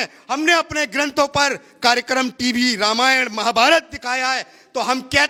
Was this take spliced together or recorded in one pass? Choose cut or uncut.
uncut